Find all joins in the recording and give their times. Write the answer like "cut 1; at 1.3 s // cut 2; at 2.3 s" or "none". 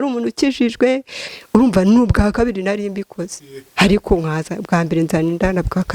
cut 1; at 1.3 s